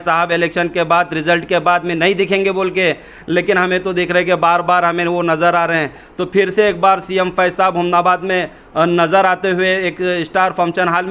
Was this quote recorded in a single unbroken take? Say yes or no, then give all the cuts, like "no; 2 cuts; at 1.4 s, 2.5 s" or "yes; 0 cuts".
yes; 0 cuts